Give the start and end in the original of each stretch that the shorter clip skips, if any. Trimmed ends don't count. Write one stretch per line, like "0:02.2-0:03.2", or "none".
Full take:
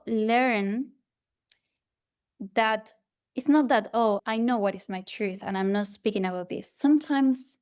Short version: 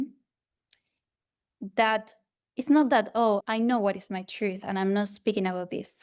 none